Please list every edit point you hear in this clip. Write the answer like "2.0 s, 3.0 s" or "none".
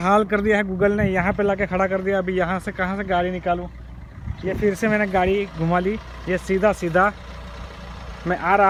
none